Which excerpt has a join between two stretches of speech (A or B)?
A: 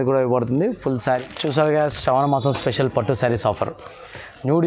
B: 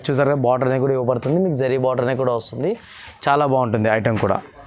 A